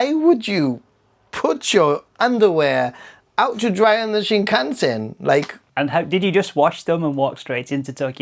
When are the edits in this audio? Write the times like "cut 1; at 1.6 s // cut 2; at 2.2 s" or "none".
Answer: cut 1; at 5.6 s